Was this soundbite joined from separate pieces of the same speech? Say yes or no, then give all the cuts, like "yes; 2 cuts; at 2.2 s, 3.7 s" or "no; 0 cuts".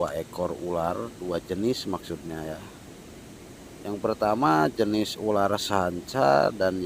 no; 0 cuts